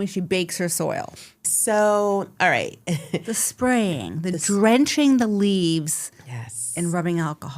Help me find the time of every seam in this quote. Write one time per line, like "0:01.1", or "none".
0:01.5